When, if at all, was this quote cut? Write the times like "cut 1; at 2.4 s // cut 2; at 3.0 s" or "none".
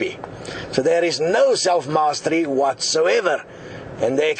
cut 1; at 2.5 s